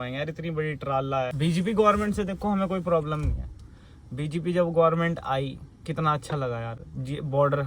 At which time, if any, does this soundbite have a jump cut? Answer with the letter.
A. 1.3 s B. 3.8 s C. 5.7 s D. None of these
A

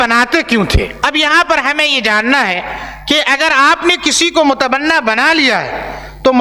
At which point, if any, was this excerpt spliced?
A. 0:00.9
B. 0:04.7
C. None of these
A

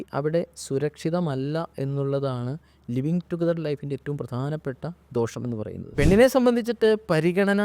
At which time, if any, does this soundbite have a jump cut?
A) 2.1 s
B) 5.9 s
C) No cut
B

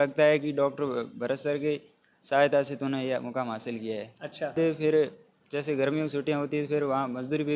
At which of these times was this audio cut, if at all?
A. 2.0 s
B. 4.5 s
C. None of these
B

